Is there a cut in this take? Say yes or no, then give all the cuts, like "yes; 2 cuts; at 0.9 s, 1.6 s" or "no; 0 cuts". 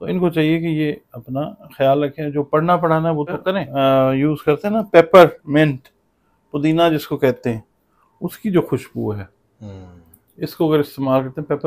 yes; 1 cut; at 3.7 s